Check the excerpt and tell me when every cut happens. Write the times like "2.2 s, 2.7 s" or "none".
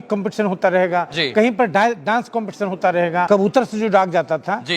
3.2 s